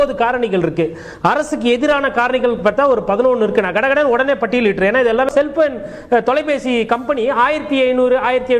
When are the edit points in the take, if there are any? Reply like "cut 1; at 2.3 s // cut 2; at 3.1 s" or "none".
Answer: cut 1; at 5.3 s